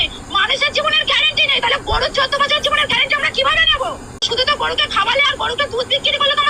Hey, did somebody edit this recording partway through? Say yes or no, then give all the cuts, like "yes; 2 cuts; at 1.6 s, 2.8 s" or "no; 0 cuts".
yes; 1 cut; at 4.2 s